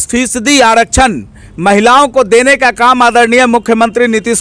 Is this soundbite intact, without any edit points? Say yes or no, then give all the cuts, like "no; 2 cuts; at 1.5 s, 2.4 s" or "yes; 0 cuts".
yes; 0 cuts